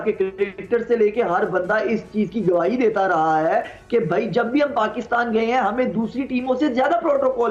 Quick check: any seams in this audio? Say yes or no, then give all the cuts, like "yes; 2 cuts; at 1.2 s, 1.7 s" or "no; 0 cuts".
no; 0 cuts